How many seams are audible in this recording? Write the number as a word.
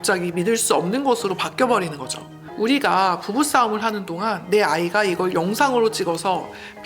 one